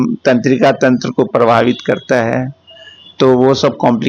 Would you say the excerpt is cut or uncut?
uncut